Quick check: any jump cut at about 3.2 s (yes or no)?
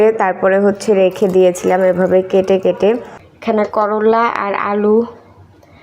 yes